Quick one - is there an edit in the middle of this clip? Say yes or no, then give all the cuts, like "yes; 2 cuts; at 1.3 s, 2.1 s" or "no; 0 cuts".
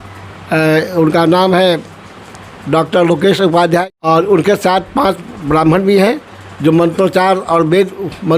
yes; 1 cut; at 3.8 s